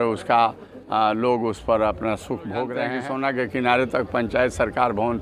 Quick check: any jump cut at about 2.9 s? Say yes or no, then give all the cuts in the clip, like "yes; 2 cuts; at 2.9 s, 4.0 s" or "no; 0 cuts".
yes; 1 cut; at 2.9 s